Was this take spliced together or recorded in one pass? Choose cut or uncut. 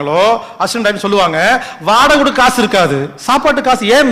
uncut